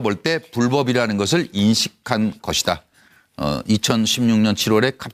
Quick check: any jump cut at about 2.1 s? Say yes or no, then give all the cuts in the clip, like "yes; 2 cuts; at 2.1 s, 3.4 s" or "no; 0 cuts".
no; 1 cut; at 3.8 s